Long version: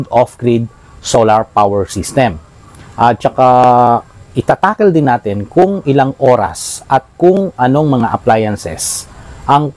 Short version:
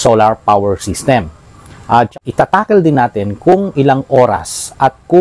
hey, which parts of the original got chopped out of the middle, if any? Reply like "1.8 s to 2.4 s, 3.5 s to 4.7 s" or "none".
3.2 s to 4.3 s